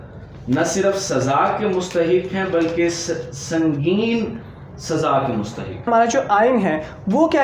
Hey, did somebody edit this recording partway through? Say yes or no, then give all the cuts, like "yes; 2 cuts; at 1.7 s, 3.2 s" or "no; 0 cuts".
yes; 1 cut; at 5.9 s